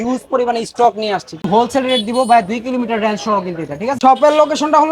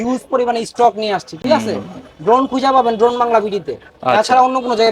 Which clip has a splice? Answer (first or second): first